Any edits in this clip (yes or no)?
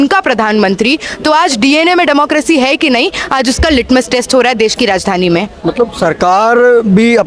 no